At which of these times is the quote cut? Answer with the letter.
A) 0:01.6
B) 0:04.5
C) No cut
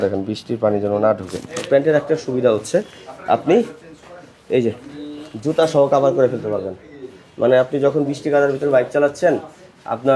A